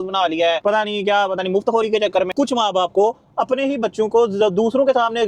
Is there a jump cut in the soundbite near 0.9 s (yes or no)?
no